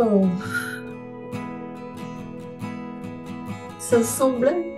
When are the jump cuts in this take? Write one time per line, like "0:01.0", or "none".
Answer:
0:00.7
0:03.8

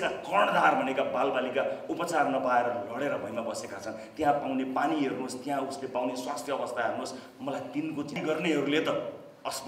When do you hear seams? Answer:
0:08.2

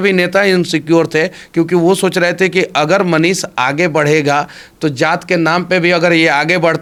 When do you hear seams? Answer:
none

